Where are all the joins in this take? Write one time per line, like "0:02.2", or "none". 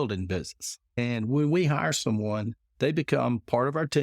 0:01.0
0:02.6